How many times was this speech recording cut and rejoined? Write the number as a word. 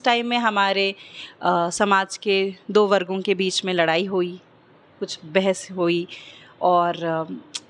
zero